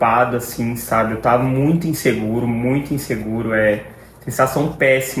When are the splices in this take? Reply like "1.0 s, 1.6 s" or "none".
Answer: none